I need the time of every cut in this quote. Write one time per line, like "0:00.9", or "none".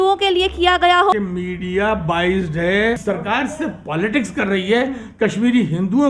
0:01.1
0:03.0